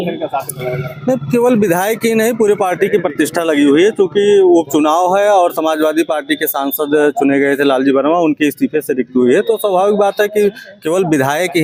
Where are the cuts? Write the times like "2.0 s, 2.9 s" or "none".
none